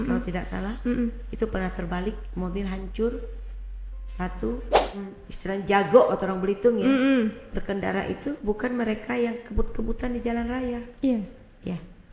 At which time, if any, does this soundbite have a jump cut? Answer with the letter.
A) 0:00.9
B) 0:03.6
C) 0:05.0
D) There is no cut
C